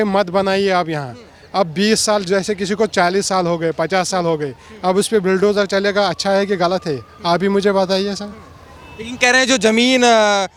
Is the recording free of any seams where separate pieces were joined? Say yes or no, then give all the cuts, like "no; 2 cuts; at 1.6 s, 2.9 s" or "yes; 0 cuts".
yes; 0 cuts